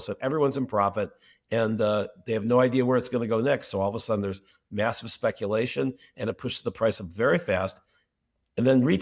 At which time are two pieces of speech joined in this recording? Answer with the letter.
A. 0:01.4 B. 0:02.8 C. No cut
C